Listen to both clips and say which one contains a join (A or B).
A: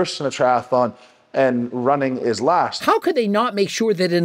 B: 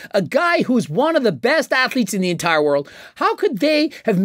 A